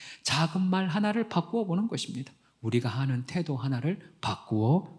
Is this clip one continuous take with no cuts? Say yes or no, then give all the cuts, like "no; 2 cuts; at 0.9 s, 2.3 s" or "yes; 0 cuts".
yes; 0 cuts